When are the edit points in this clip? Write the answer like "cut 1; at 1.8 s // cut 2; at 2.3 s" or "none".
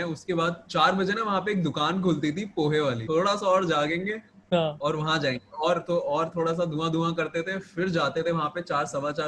cut 1; at 3.0 s